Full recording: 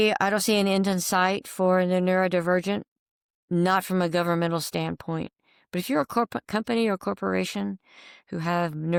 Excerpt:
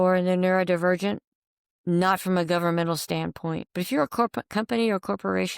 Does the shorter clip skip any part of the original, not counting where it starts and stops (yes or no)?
yes